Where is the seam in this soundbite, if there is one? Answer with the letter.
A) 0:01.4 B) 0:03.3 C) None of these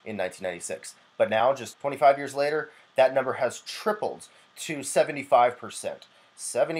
A